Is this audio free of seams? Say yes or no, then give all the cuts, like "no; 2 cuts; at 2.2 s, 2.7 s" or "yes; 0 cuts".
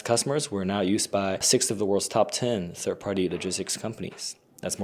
no; 1 cut; at 1.5 s